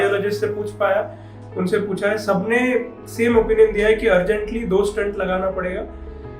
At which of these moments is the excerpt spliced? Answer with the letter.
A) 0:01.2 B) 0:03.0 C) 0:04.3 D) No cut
D